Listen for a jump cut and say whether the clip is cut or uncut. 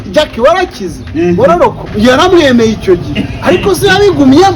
cut